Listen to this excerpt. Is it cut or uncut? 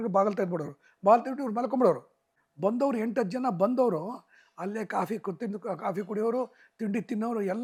uncut